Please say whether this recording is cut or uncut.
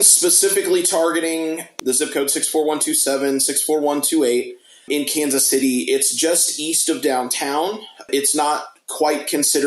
uncut